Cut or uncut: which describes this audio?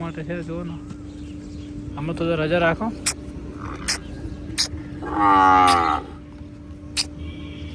uncut